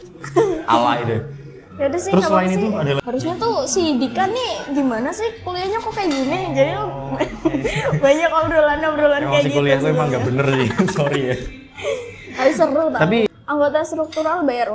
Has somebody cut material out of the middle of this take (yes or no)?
yes